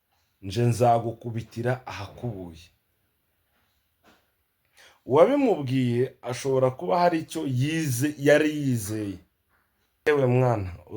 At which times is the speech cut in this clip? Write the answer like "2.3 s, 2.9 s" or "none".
10.1 s